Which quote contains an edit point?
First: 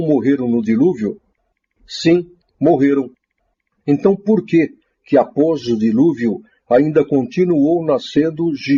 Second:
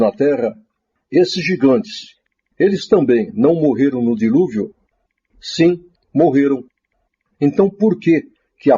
second; 1 cut; at 2.2 s

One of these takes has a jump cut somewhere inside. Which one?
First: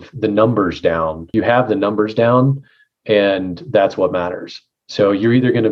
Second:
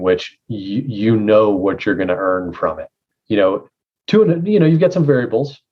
first; 1 cut; at 1.2 s

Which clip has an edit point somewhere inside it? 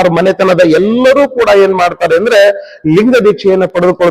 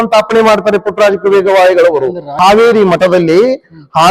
second; 1 cut; at 2.3 s

